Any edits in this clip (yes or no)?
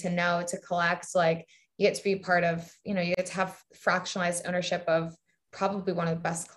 yes